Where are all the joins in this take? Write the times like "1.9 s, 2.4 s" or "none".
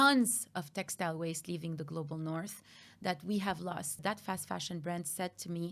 4.0 s